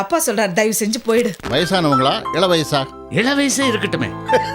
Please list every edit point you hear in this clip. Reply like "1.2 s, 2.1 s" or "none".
1.4 s